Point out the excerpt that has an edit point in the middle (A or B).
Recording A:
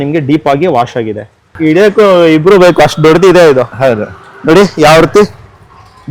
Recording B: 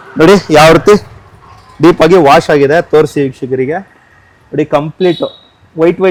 A